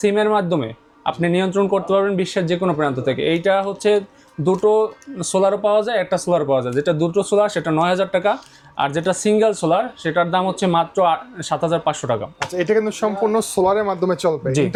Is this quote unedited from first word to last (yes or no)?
yes